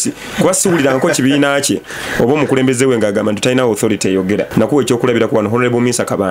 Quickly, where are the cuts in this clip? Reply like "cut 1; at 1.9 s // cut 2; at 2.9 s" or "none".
cut 1; at 4.5 s